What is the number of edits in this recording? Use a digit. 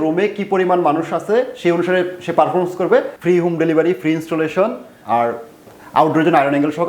1